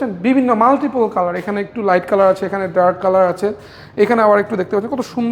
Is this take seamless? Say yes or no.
yes